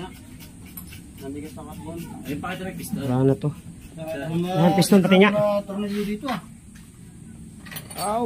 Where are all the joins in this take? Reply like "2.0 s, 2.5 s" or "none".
4.3 s